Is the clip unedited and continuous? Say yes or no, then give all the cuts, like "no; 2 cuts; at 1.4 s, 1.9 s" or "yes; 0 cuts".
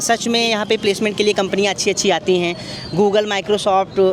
yes; 0 cuts